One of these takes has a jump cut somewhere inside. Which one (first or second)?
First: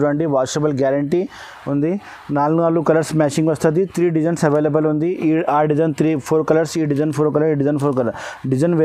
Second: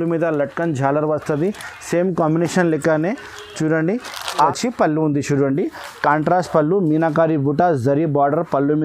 second